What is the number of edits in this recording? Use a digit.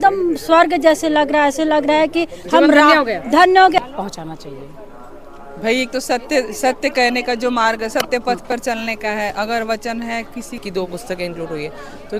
2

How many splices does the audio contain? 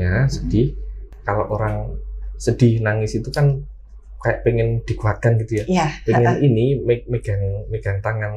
1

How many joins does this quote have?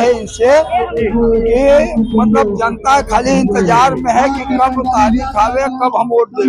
0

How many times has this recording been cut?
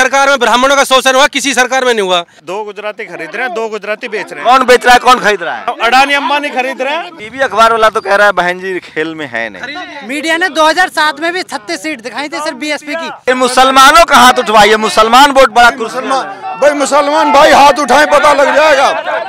5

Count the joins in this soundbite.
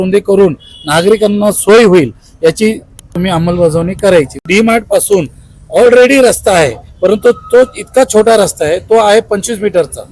2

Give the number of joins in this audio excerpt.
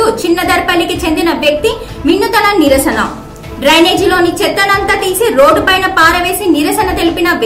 0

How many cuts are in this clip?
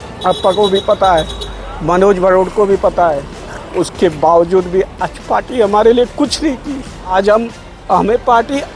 1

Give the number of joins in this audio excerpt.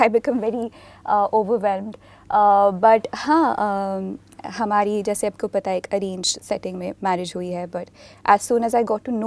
0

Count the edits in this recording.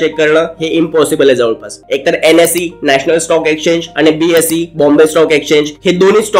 1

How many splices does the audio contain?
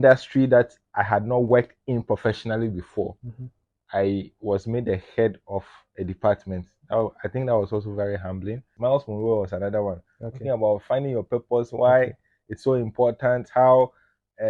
1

